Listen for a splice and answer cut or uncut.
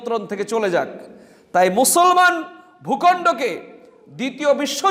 uncut